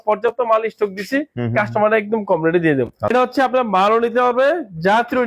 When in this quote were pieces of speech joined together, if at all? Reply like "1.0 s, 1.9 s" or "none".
3.1 s